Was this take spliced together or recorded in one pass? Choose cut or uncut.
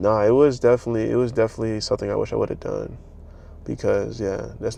uncut